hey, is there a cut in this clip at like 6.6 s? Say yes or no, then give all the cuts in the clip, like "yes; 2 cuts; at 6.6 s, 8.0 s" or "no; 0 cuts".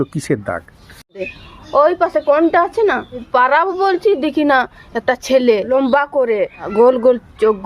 yes; 4 cuts; at 1.3 s, 3.2 s, 5.7 s, 6.6 s